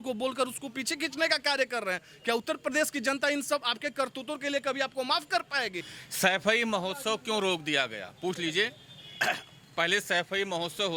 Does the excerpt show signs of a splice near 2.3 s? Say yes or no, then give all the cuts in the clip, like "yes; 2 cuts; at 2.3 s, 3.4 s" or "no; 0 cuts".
no; 1 cut; at 5.9 s